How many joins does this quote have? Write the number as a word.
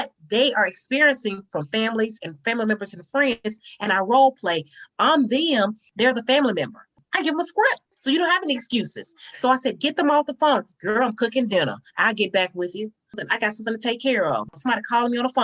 zero